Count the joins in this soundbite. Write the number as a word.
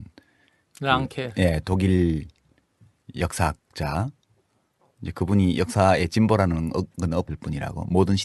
one